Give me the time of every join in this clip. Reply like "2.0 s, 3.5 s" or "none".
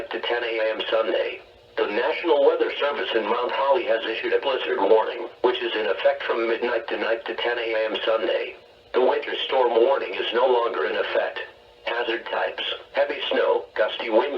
1.1 s